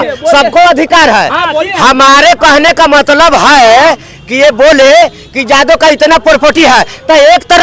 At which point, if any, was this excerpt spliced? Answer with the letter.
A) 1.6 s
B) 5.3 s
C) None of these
C